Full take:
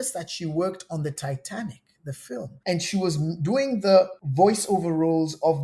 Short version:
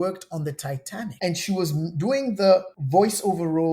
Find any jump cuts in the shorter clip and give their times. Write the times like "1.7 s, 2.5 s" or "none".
1.1 s